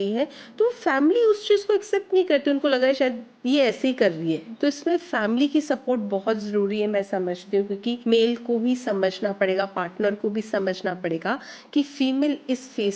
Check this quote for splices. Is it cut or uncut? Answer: cut